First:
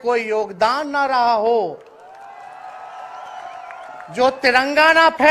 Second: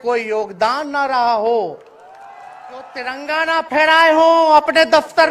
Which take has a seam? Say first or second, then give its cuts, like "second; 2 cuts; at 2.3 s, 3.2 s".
second; 1 cut; at 3.1 s